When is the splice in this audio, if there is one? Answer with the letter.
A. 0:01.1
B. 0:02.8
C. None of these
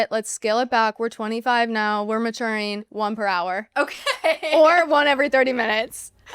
B